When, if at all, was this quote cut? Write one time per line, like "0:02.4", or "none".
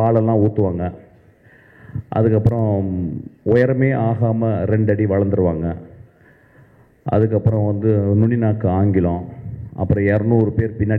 none